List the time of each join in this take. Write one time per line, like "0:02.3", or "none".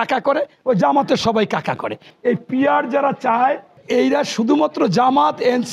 0:02.1